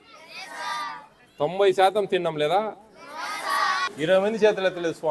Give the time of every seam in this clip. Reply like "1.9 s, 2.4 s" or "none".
3.8 s